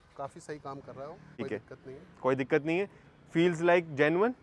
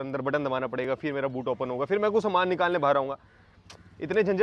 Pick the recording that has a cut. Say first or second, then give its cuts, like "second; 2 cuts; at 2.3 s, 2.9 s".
first; 1 cut; at 1.4 s